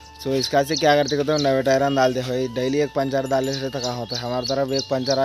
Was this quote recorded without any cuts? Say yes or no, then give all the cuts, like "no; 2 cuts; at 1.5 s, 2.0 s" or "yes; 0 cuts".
yes; 0 cuts